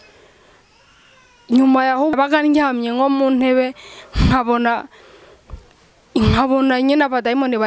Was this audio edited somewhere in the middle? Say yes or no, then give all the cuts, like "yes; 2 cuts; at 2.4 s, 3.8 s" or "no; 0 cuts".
yes; 1 cut; at 2.1 s